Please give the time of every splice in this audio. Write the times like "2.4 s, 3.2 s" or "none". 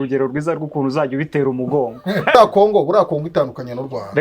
2.4 s